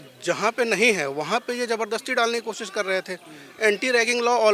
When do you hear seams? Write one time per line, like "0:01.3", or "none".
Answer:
none